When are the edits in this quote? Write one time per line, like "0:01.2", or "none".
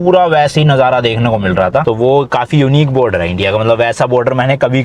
0:01.8